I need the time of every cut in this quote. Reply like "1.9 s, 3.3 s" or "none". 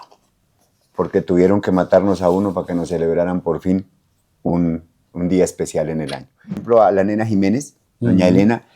6.6 s